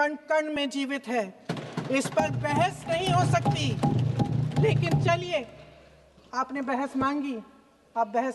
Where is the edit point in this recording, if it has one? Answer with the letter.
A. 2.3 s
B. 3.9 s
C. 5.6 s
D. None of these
D